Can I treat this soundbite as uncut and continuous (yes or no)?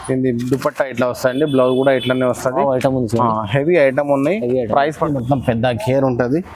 no